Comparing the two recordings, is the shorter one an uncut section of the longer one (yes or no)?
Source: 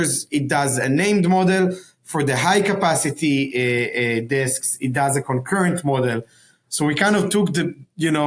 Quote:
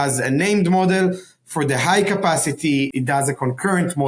no